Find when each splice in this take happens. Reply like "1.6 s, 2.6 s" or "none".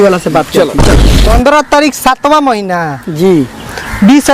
1.2 s